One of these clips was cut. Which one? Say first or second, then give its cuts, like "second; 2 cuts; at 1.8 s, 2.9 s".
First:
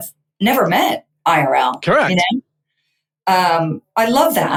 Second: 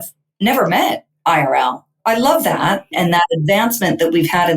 second; 2 cuts; at 1.8 s, 3.0 s